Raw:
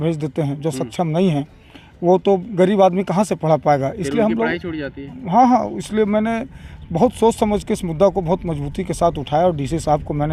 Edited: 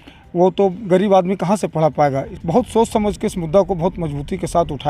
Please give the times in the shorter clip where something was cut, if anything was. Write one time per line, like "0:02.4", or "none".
0:02.3